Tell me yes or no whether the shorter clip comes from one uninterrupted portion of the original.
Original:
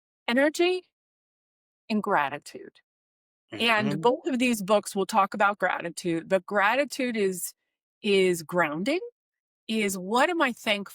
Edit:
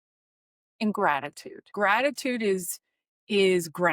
no